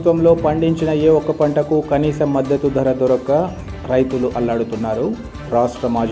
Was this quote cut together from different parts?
no; 0 cuts

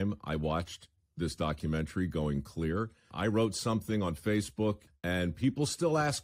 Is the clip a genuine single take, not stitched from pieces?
no; 2 cuts; at 3.1 s, 4.9 s

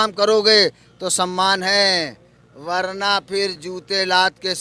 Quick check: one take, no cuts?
yes; 0 cuts

